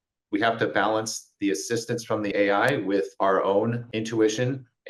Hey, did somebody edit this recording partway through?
yes; 3 cuts; at 2.3 s, 3.1 s, 3.9 s

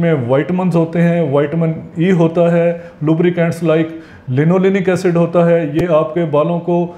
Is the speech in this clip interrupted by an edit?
no; 0 cuts

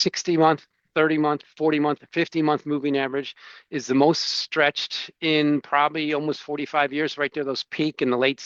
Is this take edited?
no; 0 cuts

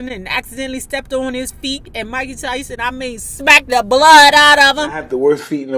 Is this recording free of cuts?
no; 2 cuts; at 1.9 s, 3.2 s

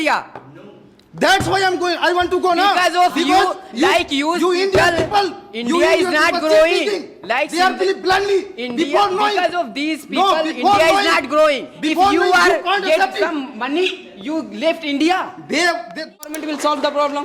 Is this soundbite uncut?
no; 1 cut; at 16.3 s

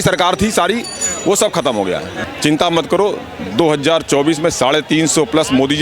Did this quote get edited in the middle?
yes; 1 cut; at 2.1 s

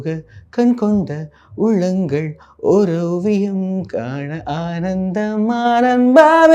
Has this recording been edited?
no; 0 cuts

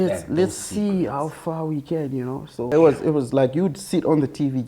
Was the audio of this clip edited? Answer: yes; 1 cut; at 2.7 s

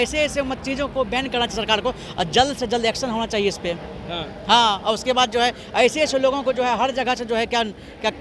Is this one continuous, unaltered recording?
yes; 0 cuts

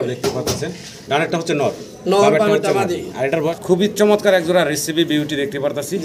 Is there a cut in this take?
yes; 1 cut; at 3.5 s

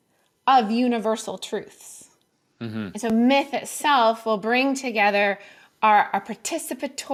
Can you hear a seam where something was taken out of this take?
no; 0 cuts

